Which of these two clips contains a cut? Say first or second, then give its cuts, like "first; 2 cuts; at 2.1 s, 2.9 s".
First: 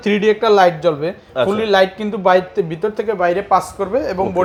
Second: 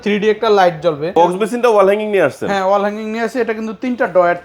second; 1 cut; at 1.1 s